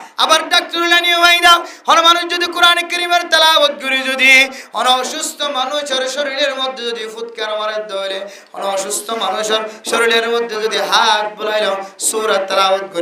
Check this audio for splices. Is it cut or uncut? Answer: uncut